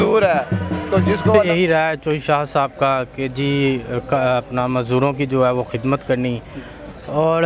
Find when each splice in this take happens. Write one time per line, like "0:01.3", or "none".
0:01.3